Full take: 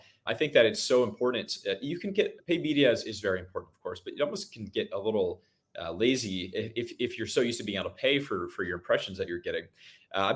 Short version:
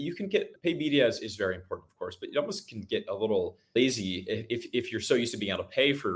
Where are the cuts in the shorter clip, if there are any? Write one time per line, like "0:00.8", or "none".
0:03.6